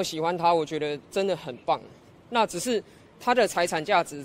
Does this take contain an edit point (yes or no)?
no